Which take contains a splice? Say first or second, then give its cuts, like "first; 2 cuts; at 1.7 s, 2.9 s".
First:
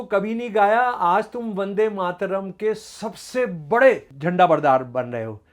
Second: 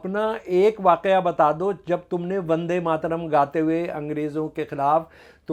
first; 1 cut; at 4.1 s